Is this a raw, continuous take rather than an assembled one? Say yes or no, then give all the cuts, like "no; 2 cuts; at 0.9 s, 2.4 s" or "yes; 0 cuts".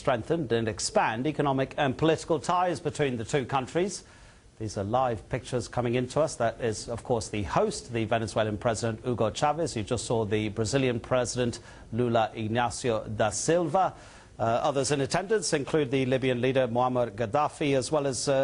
no; 1 cut; at 6.1 s